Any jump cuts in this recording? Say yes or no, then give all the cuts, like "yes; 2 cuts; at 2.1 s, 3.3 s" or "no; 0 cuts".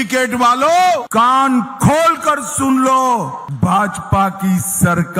yes; 2 cuts; at 1.1 s, 3.4 s